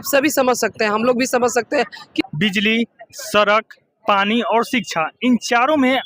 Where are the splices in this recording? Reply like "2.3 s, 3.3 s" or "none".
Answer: 2.2 s